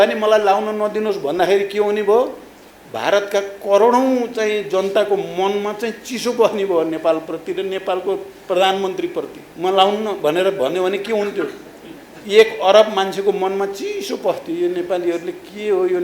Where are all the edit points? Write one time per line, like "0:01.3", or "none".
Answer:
0:09.4